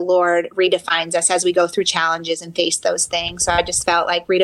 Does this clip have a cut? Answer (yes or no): no